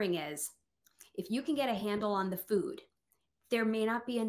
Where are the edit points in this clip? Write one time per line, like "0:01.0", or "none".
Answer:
none